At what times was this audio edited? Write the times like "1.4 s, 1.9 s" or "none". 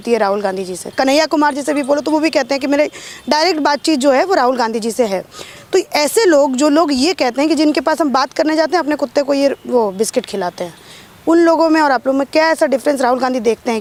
none